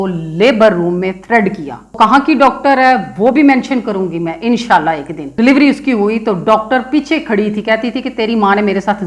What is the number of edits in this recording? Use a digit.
2